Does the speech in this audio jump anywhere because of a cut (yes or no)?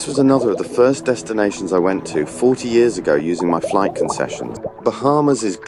yes